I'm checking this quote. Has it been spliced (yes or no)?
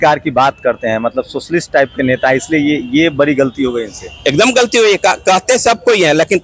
no